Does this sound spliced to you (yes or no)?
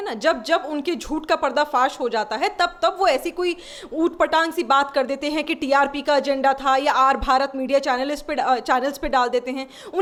no